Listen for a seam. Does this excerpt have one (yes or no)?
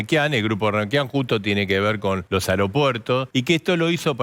yes